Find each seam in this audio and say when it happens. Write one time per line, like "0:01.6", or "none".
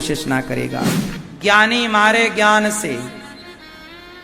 0:01.0

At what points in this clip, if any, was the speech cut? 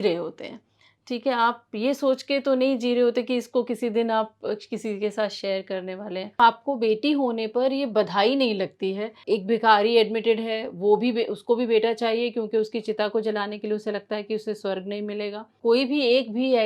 0:06.4
0:09.2
0:15.5

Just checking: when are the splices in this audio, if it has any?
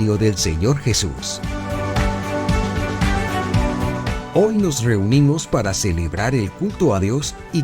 0:01.2
0:04.2

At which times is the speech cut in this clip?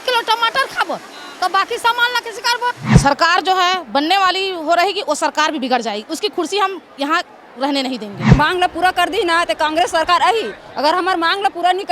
0:02.8
0:08.3

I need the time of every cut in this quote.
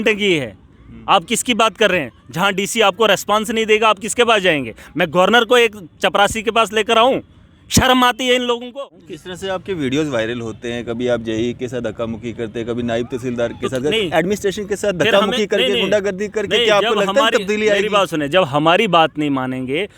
0:08.7

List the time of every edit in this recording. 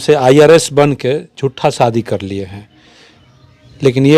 none

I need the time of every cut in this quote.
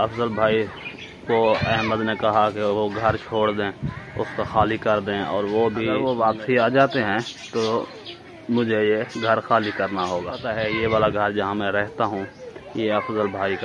0:06.0
0:10.5

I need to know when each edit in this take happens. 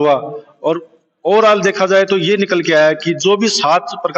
none

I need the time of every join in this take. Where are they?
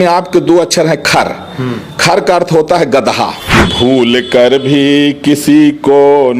0:03.4

